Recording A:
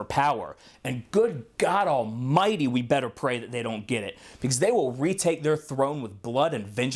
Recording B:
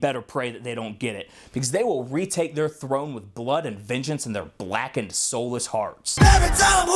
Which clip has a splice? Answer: B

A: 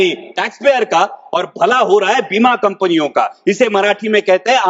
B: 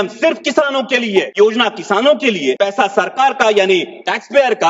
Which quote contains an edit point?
B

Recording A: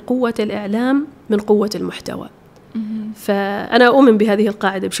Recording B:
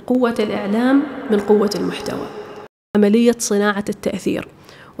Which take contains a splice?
B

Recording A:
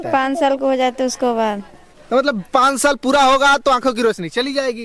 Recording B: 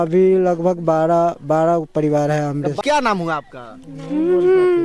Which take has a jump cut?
B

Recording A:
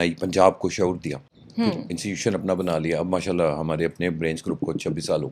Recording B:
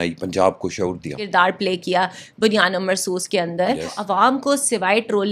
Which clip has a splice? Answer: B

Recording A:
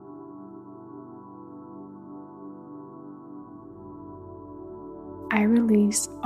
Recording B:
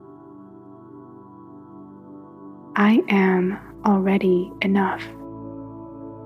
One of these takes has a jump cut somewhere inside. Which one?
B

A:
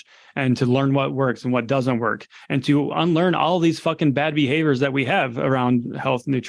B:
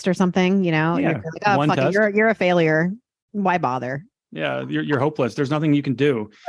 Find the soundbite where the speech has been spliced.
B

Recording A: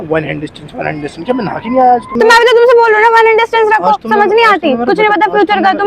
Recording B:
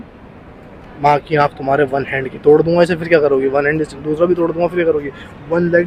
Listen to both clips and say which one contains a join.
A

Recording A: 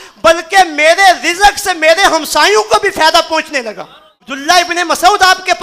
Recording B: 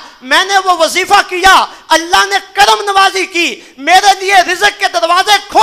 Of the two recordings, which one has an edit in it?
A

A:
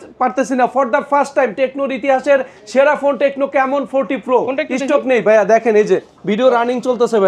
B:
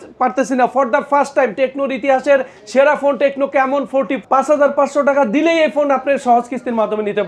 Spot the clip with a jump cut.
B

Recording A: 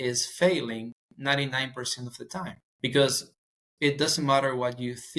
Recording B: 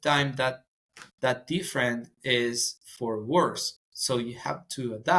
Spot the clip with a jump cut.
A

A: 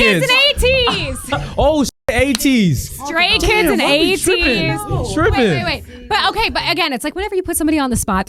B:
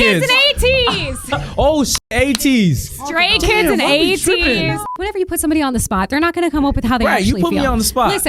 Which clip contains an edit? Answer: B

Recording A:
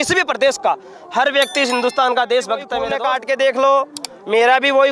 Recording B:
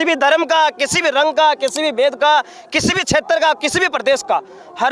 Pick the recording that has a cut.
A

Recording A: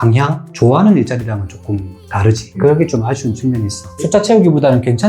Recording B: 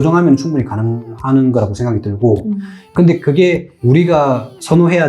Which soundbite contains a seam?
A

